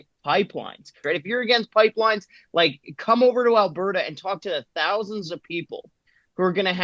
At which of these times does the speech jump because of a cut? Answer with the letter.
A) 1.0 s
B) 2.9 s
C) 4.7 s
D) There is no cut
A